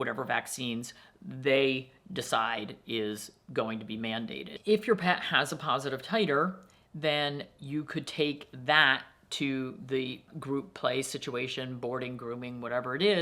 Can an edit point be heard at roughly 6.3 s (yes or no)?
no